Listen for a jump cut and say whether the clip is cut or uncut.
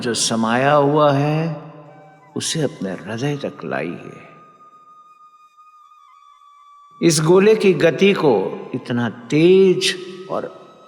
uncut